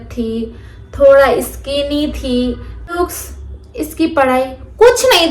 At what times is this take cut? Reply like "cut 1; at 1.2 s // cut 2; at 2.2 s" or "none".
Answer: cut 1; at 2.9 s